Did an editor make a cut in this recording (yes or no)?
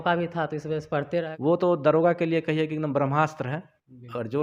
yes